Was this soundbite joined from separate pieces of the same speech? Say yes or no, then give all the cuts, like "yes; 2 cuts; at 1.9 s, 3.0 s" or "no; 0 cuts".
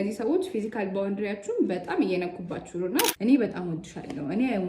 yes; 1 cut; at 3.1 s